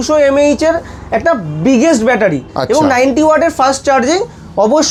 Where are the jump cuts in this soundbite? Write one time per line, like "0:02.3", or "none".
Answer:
none